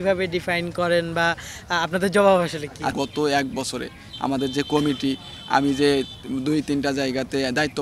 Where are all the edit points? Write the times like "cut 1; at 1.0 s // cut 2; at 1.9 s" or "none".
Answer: cut 1; at 2.9 s